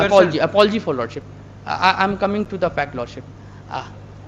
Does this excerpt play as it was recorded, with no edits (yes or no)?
yes